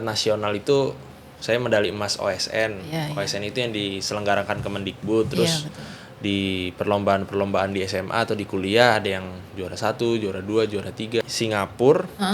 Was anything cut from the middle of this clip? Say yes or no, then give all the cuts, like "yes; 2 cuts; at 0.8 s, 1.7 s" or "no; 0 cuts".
yes; 1 cut; at 11.2 s